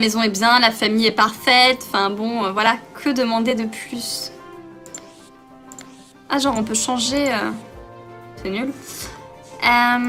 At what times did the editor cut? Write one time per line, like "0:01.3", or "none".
none